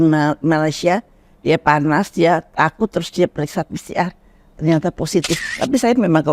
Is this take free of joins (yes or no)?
no